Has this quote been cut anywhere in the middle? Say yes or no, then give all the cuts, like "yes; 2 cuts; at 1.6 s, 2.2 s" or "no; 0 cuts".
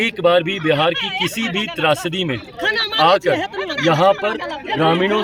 no; 0 cuts